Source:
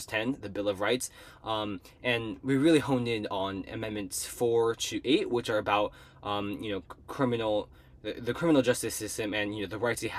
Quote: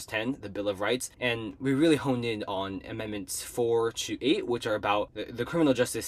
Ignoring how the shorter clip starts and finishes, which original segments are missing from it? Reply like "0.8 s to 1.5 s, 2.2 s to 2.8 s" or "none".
1.1 s to 1.9 s, 6.0 s to 8.1 s